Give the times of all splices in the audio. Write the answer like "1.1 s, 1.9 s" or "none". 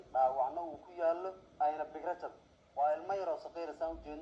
1.4 s